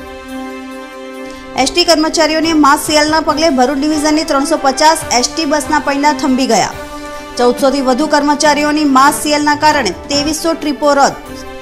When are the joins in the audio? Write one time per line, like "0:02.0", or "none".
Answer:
0:01.1